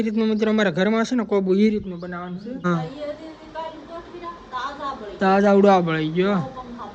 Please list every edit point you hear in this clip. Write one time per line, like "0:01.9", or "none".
0:02.6